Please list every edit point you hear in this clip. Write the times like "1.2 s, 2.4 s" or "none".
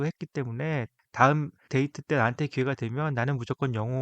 1.0 s, 1.6 s